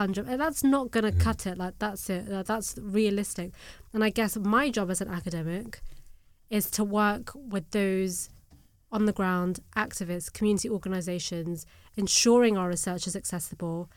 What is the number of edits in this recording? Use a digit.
0